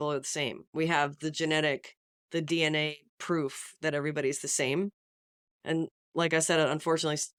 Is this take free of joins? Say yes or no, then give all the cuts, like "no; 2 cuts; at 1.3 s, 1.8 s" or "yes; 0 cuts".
yes; 0 cuts